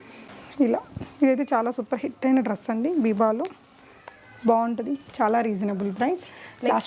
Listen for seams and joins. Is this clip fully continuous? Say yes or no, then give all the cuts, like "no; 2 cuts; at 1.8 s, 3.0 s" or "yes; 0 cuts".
yes; 0 cuts